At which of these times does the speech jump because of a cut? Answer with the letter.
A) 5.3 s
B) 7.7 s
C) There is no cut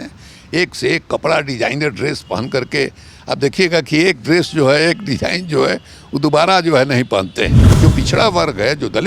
B